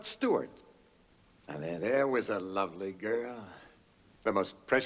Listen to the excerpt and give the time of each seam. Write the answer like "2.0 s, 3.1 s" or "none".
none